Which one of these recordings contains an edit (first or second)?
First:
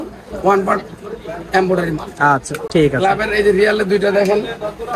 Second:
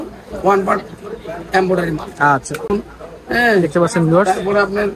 second